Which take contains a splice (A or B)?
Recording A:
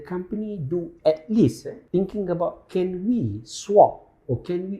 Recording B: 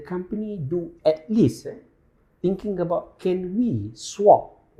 A